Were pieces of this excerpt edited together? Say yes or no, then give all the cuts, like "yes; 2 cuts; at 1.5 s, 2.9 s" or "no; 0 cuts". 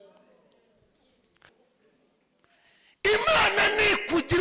yes; 1 cut; at 1.5 s